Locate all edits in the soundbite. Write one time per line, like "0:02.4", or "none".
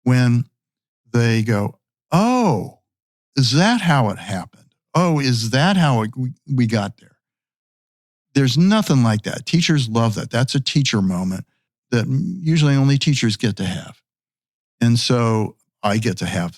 0:11.8
0:15.6